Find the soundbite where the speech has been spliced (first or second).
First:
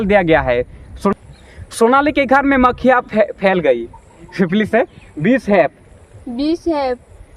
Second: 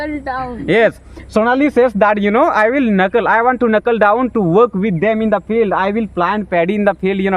first